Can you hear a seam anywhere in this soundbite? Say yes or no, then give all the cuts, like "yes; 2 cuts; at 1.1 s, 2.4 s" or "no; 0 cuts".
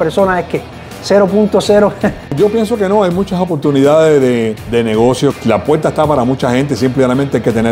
yes; 3 cuts; at 2.3 s, 4.6 s, 5.4 s